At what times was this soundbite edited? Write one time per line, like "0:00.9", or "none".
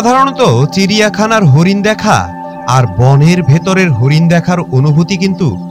none